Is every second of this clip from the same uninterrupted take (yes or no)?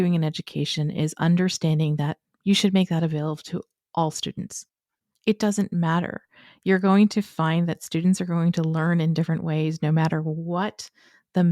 no